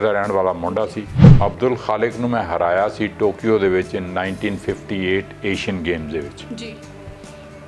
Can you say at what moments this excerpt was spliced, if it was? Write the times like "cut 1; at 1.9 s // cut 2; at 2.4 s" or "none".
cut 1; at 1.2 s